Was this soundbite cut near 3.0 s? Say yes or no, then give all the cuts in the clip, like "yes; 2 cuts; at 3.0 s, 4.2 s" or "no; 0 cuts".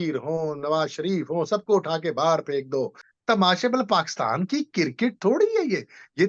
yes; 1 cut; at 3.0 s